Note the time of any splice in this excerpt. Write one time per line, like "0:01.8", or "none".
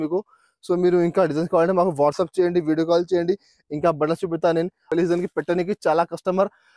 0:04.9

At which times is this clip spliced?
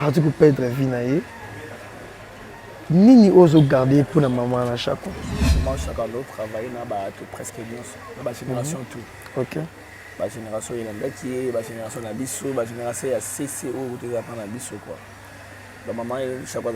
0:05.6

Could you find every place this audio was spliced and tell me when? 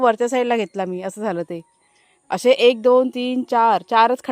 none

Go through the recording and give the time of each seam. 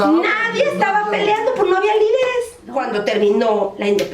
0:02.6

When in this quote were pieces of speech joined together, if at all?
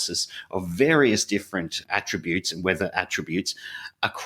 none

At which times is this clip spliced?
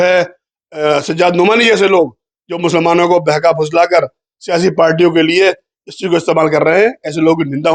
none

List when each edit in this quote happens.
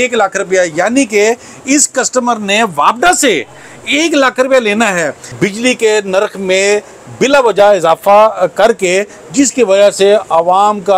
0:05.2

